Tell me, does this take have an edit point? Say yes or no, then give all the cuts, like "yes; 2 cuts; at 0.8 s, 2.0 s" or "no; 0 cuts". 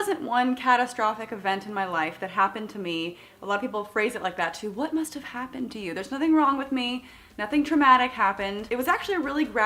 no; 0 cuts